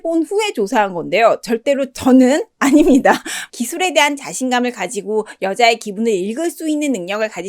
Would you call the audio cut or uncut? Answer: cut